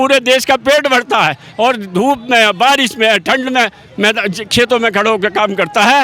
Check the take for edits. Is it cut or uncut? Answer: uncut